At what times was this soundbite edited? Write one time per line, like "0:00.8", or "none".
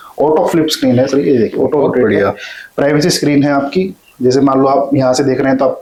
none